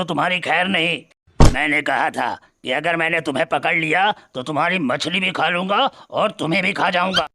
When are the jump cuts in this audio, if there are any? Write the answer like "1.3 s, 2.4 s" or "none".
1.4 s